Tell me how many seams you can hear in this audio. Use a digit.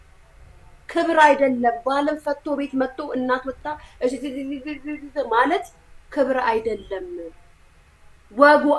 0